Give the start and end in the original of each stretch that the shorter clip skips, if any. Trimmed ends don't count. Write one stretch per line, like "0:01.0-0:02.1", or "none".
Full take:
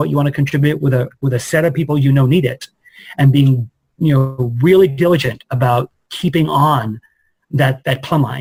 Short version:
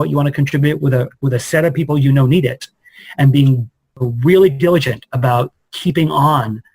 0:03.9-0:04.3

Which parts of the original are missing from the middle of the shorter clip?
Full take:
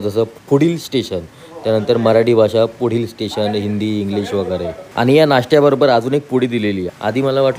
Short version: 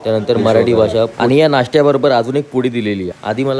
0:02.8-0:04.9

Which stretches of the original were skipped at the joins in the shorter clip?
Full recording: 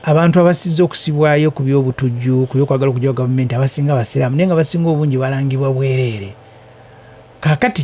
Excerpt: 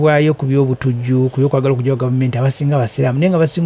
none

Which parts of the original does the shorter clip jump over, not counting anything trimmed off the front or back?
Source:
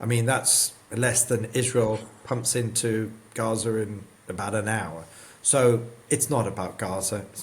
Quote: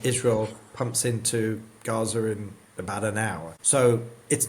0:05.0-0:05.3

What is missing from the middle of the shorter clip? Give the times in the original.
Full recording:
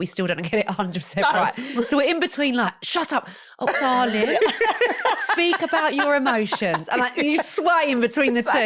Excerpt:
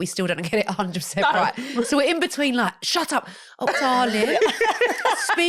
none

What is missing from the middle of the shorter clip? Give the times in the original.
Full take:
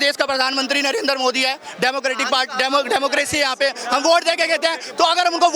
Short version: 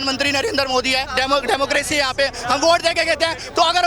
0:01.6-0:02.5

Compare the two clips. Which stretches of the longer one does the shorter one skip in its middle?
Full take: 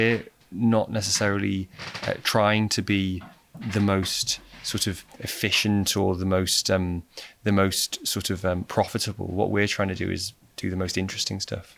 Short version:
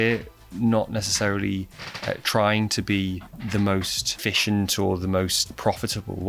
0:03.3-0:03.5
0:04.2-0:05.2
0:06.6-0:08.6

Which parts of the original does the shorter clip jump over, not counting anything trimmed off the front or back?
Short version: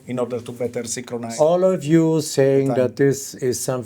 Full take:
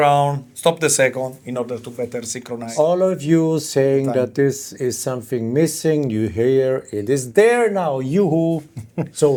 none

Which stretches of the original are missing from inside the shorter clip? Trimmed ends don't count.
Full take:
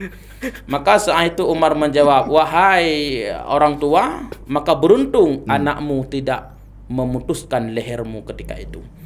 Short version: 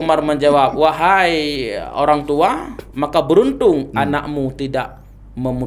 none

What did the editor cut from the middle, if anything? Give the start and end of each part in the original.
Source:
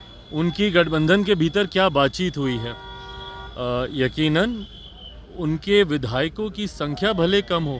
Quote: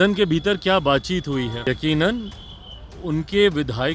0:02.7-0:04.0

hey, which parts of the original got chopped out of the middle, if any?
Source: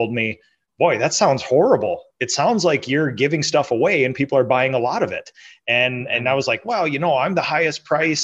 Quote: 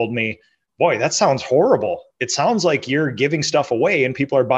none

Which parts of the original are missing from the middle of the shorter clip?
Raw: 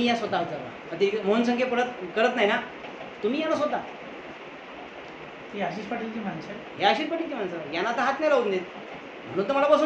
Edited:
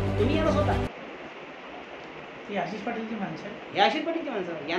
none

